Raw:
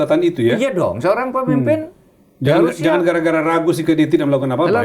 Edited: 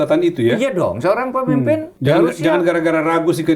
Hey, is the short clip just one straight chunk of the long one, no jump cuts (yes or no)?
no